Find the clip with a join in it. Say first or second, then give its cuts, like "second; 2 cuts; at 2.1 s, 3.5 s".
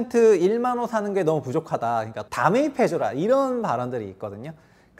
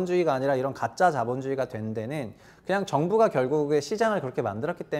first; 1 cut; at 2.2 s